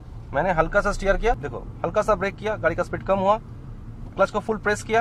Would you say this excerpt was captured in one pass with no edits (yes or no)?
no